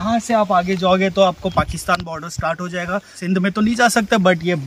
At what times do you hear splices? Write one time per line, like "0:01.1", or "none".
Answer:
0:03.2